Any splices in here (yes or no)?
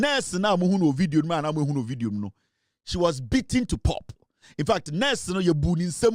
no